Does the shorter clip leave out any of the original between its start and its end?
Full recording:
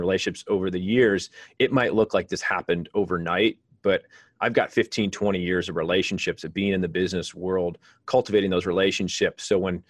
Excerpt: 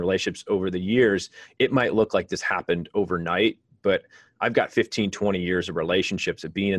no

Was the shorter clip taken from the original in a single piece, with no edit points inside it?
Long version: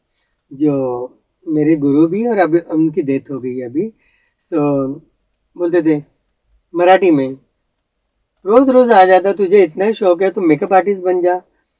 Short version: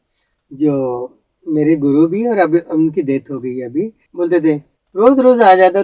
no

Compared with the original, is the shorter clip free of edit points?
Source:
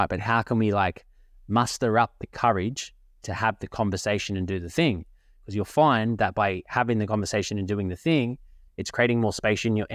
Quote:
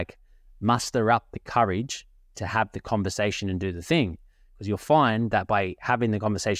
yes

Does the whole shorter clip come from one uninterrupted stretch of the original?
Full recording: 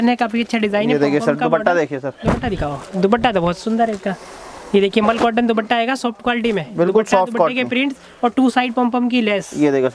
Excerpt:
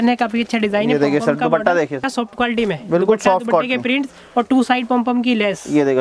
no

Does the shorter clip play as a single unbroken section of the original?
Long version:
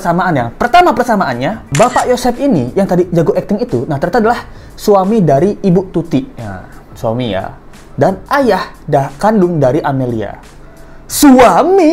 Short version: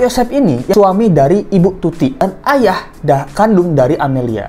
no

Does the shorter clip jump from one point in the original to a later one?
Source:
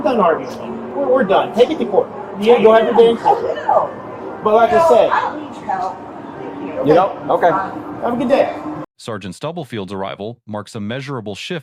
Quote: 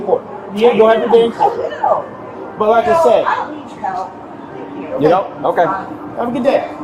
no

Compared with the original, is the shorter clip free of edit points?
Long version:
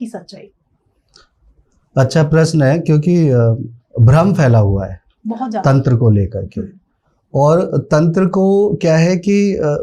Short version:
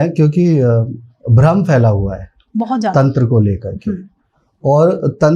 yes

